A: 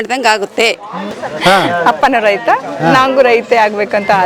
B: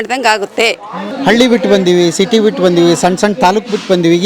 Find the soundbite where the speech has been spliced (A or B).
A